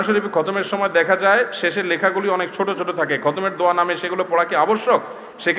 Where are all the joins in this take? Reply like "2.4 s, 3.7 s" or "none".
none